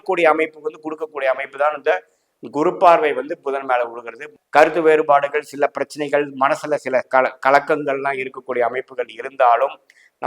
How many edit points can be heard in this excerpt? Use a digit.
1